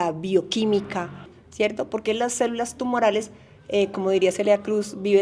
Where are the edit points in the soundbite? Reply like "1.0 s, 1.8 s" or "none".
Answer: 1.4 s